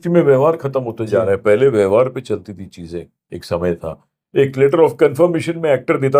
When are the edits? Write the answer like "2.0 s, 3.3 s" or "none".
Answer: none